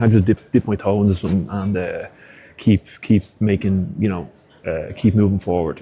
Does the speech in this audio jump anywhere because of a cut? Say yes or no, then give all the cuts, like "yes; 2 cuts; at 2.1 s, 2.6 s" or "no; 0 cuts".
no; 0 cuts